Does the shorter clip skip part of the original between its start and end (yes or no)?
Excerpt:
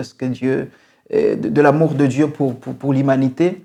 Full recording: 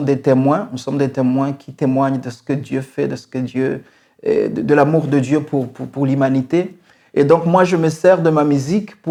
no